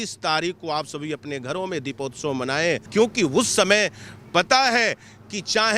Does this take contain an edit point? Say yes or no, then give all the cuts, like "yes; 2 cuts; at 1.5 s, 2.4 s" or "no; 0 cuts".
yes; 1 cut; at 2.8 s